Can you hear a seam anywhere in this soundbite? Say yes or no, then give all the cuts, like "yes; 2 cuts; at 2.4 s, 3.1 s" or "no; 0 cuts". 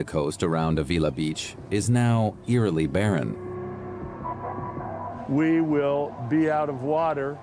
no; 0 cuts